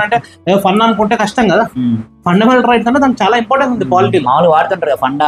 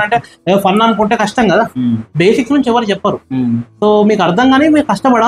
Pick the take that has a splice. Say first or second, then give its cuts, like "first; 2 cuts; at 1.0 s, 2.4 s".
second; 1 cut; at 2.1 s